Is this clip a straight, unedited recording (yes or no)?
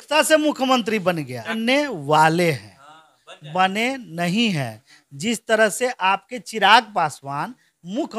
no